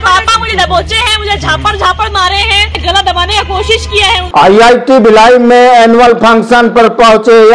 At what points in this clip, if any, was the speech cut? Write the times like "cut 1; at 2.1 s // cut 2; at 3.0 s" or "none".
cut 1; at 2.8 s // cut 2; at 4.2 s

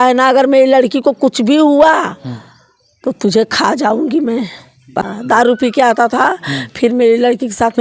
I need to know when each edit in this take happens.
cut 1; at 5.1 s

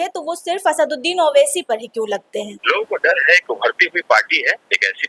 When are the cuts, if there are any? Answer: cut 1; at 2.6 s

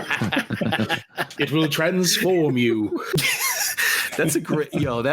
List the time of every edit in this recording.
cut 1; at 3.2 s

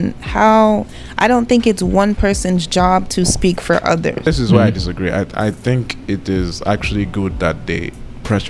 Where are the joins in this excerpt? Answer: cut 1; at 4.2 s

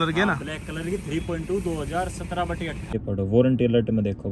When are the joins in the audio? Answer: cut 1; at 2.9 s

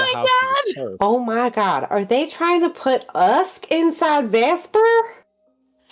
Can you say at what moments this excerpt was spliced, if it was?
cut 1; at 0.9 s

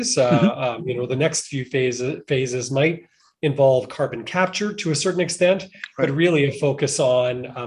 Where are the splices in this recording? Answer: none

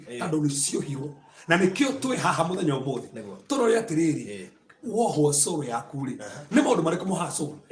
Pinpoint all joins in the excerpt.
none

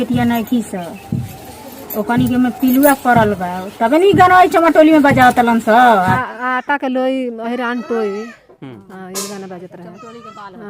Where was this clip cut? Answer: cut 1; at 6.0 s

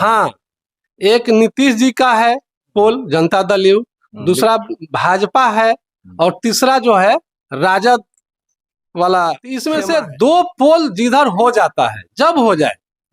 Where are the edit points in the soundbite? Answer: cut 1; at 9.5 s

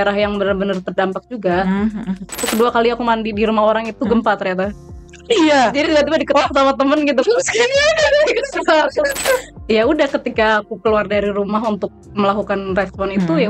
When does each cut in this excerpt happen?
cut 1; at 2.4 s // cut 2; at 9.5 s

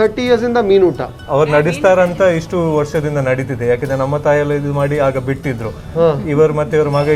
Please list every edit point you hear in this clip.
none

